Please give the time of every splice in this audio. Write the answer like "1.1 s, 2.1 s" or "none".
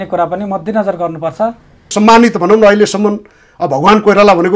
1.9 s

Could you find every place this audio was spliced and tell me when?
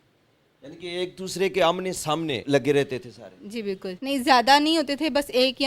2.4 s, 3.9 s

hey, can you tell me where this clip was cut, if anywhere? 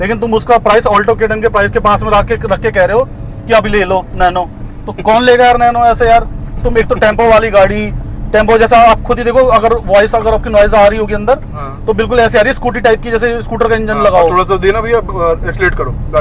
none

